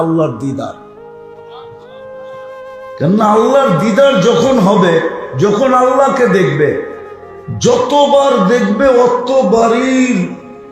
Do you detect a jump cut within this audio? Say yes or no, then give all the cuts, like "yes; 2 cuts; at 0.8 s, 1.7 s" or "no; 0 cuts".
yes; 2 cuts; at 0.9 s, 2.7 s